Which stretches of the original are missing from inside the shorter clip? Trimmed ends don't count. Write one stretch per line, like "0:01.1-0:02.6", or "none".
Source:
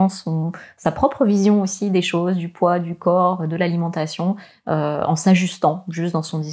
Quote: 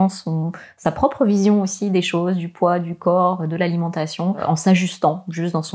0:04.4-0:05.0